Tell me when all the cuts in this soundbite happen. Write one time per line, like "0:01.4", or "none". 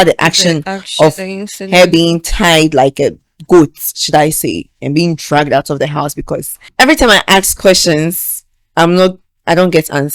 0:06.6